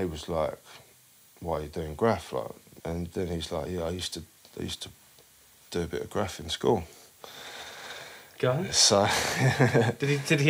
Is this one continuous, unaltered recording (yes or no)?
no